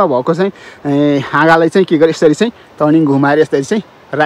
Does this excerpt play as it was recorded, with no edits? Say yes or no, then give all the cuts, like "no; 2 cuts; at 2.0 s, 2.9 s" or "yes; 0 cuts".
yes; 0 cuts